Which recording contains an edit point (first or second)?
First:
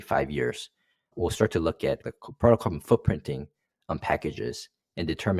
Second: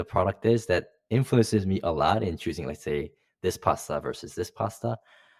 first